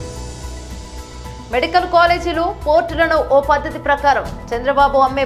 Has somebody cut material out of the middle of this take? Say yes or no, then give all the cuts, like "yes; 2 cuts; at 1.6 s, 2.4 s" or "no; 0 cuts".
yes; 1 cut; at 1.3 s